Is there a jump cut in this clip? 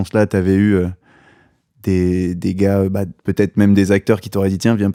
no; 0 cuts

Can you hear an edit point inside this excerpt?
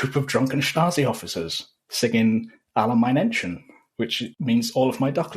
yes; 1 cut; at 4.3 s

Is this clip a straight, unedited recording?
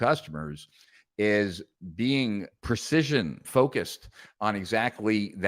no; 2 cuts; at 2.5 s, 3.5 s

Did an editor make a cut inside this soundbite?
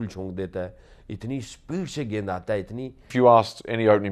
yes; 1 cut; at 3.1 s

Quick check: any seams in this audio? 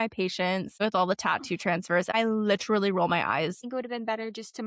yes; 3 cuts; at 0.8 s, 2.1 s, 3.6 s

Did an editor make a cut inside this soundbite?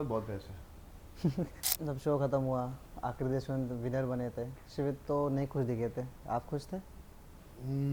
yes; 1 cut; at 1.6 s

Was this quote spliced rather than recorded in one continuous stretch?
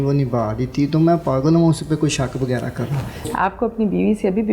yes; 1 cut; at 3.3 s

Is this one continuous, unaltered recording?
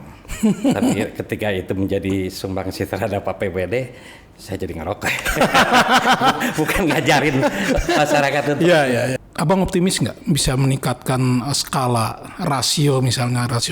no; 1 cut; at 9.2 s

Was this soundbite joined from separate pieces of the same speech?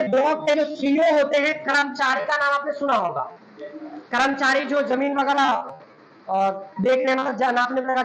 no; 0 cuts

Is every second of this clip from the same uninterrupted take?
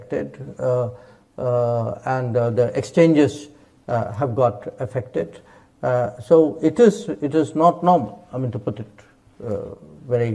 yes; 0 cuts

